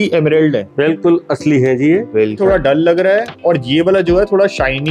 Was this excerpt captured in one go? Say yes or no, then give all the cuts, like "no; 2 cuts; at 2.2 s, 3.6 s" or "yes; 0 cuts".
no; 1 cut; at 2.4 s